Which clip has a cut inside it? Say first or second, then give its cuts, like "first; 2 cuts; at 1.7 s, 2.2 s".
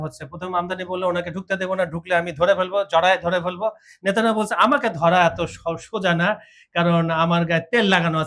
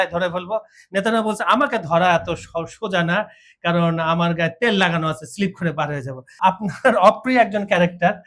second; 1 cut; at 6.3 s